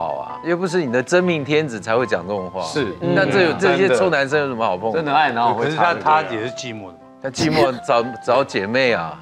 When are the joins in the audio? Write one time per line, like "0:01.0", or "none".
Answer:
none